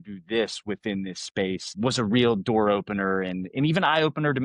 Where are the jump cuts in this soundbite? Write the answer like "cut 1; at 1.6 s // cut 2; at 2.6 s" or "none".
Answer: cut 1; at 1.7 s

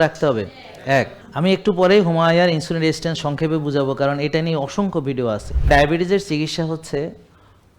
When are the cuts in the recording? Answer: cut 1; at 1.2 s // cut 2; at 5.5 s

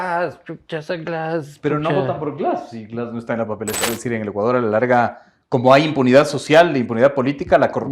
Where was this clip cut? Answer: cut 1; at 3.9 s

